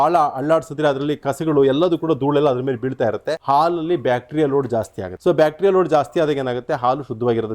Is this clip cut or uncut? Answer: cut